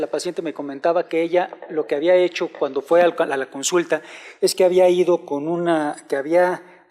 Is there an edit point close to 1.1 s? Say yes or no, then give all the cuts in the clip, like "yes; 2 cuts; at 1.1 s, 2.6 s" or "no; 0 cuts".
no; 1 cut; at 2.3 s